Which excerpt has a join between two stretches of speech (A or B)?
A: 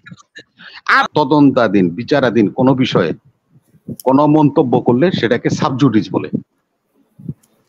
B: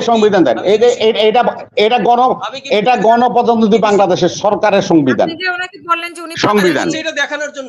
A